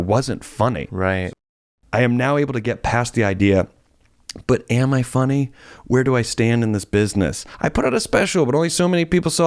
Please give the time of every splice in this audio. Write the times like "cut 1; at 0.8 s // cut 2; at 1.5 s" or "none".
cut 1; at 1.2 s // cut 2; at 7.5 s